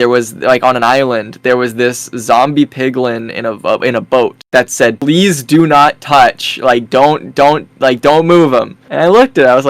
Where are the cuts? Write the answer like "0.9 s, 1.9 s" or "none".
none